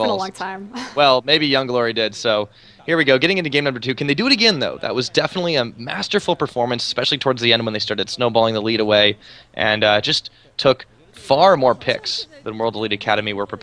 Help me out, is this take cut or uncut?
cut